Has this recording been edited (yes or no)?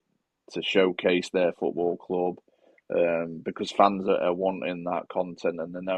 no